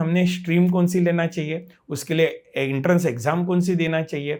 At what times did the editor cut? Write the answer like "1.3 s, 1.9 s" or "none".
none